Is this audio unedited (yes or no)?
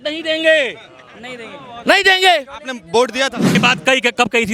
no